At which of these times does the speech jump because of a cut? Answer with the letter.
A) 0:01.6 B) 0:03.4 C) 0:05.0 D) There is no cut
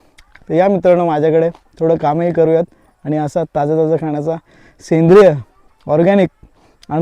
D